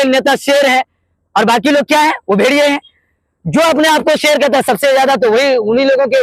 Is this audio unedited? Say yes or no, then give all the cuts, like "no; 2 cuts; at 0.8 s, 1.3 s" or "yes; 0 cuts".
yes; 0 cuts